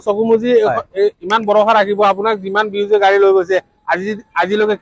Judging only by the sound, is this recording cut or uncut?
uncut